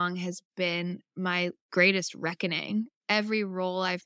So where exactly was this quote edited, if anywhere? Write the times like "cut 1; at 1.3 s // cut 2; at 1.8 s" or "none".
cut 1; at 1.6 s // cut 2; at 2.9 s